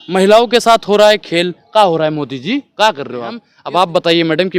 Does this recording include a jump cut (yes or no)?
yes